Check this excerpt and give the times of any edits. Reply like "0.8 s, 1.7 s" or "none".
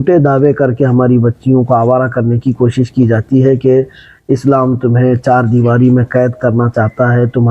none